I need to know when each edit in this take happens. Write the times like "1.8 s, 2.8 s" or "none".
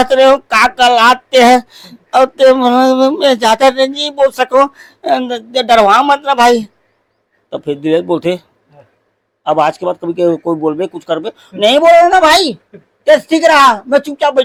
none